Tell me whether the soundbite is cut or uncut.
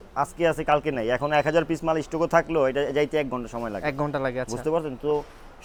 uncut